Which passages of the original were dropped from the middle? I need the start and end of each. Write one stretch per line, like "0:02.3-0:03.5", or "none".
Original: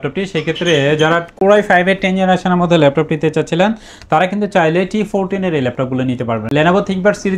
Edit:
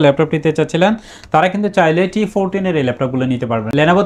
none